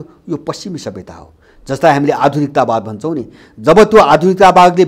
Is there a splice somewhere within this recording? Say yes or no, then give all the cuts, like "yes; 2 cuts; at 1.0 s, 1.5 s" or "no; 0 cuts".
no; 0 cuts